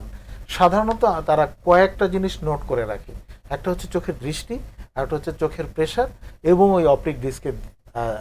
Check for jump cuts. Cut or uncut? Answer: uncut